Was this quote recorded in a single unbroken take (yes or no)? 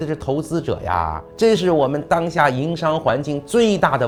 yes